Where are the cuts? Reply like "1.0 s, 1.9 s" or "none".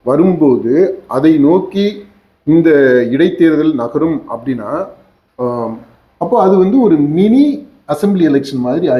none